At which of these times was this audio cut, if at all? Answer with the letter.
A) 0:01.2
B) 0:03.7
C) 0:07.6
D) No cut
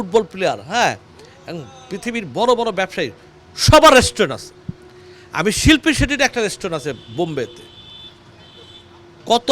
D